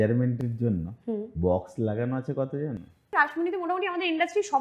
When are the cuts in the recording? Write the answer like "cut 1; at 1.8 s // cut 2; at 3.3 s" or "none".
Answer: cut 1; at 3.1 s